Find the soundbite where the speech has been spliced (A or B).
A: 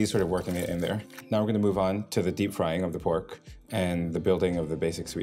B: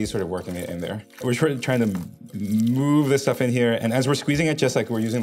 A